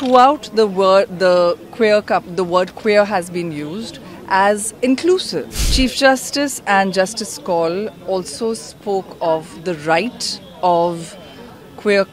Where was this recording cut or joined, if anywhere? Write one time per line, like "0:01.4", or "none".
0:05.6